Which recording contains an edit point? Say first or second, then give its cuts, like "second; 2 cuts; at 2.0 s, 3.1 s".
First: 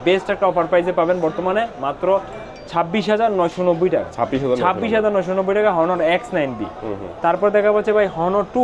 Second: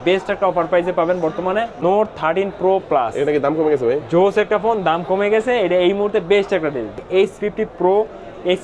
second; 2 cuts; at 1.7 s, 7.0 s